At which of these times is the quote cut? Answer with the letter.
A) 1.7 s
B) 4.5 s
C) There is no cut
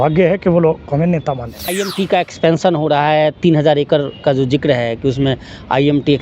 A